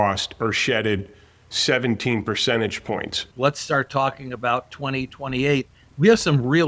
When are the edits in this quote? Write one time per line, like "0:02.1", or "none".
0:03.2